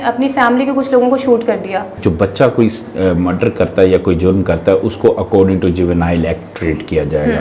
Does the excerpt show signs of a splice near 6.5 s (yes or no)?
no